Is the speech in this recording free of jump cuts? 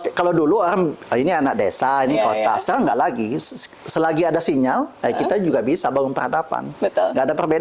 yes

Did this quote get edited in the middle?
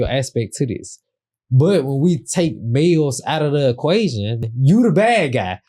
yes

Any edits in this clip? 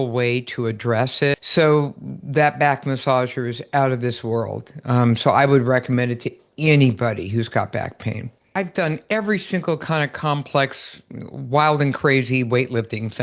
yes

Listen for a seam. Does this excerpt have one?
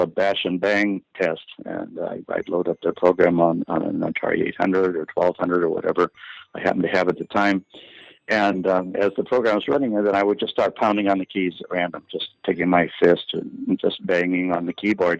no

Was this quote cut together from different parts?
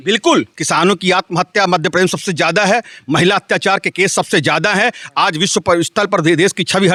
no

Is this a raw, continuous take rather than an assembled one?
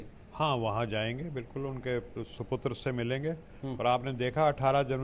yes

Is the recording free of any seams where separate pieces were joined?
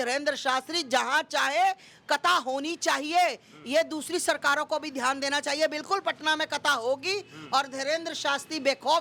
yes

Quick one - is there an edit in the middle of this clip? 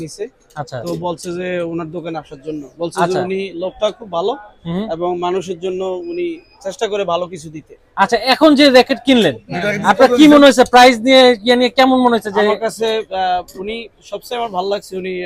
no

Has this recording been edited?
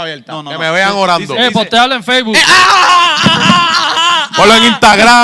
no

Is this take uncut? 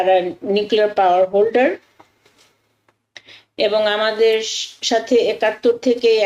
yes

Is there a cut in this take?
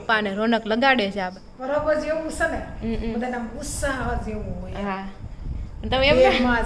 yes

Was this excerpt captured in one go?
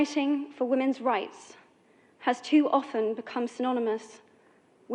yes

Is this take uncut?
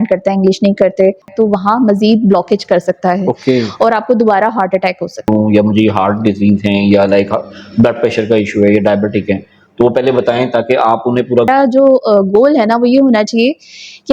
no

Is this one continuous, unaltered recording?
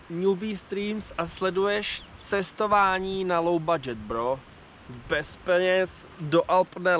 yes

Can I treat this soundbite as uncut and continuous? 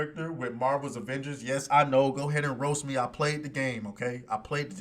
yes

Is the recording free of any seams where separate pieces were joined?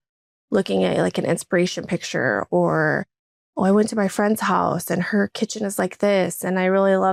yes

